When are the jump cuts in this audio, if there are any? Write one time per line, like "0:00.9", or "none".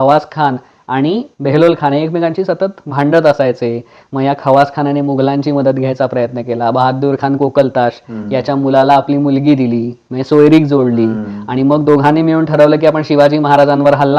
0:01.3